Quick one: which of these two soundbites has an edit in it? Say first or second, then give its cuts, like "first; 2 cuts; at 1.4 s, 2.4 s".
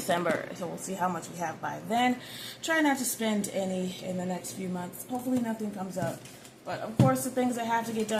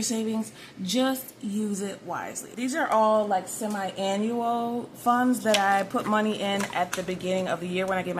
second; 1 cut; at 2.4 s